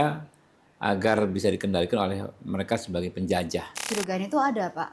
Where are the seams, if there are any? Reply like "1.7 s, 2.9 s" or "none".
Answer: 3.9 s